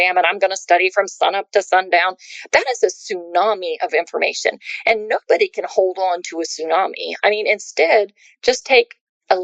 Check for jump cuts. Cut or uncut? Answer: uncut